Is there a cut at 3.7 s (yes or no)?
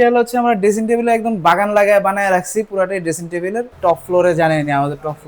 yes